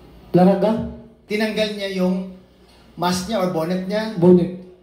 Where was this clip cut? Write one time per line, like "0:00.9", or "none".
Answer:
0:01.2